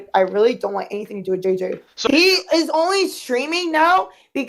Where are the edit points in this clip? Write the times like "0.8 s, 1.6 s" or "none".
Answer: 2.1 s